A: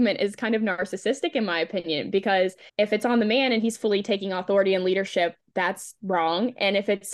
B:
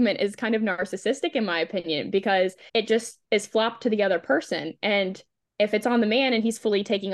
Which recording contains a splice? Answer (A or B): A